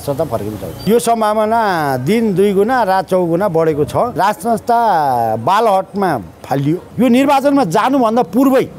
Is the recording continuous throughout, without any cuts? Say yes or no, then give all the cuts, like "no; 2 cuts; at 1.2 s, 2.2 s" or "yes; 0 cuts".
no; 3 cuts; at 0.9 s, 4.2 s, 6.9 s